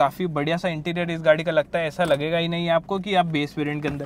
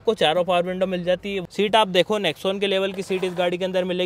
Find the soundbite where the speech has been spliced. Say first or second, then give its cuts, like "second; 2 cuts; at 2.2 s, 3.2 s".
second; 1 cut; at 1.4 s